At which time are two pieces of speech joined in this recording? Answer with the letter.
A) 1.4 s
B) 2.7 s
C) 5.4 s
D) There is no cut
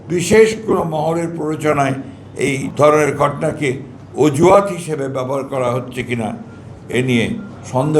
B